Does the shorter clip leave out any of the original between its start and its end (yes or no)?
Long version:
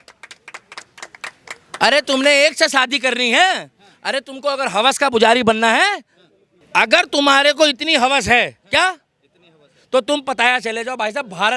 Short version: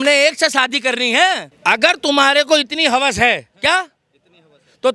yes